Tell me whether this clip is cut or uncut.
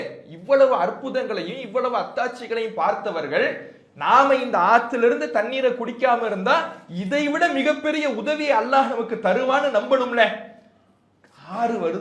uncut